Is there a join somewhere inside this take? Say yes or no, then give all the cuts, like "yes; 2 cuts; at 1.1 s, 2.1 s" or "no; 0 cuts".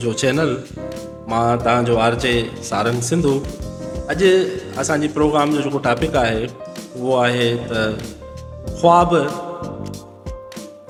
no; 0 cuts